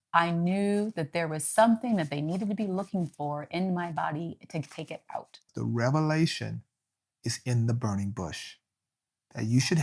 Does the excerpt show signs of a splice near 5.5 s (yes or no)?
yes